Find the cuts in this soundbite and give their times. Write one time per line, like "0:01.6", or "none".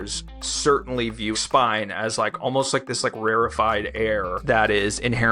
0:01.3